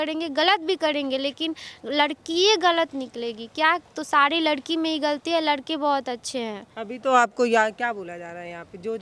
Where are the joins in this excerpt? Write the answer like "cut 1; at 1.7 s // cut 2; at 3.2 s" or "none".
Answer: none